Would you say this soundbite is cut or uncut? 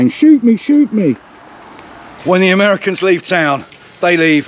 cut